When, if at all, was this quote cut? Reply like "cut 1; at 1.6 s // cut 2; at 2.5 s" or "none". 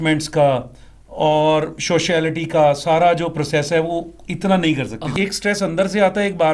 cut 1; at 5.2 s